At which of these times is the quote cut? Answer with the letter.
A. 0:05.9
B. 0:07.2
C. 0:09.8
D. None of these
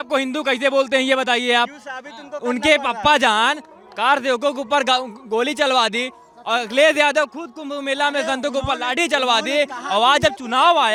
D